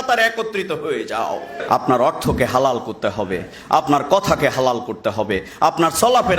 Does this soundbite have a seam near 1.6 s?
yes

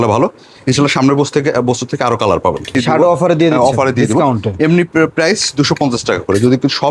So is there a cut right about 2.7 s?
yes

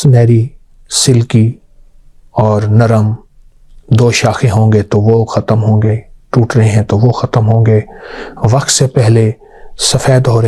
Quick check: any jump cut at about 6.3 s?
no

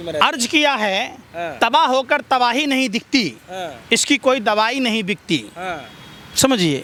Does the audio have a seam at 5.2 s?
no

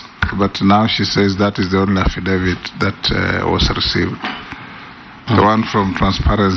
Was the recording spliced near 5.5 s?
yes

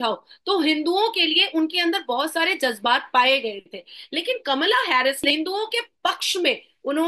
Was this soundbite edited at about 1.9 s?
no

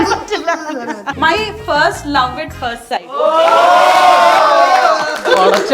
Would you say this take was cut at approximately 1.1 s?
yes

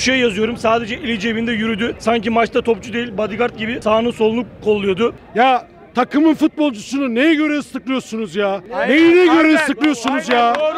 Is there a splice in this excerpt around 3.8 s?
yes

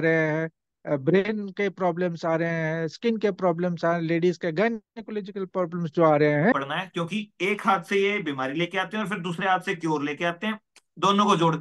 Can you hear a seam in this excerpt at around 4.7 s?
no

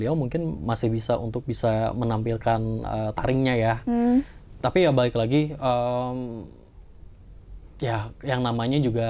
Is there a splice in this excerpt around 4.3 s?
no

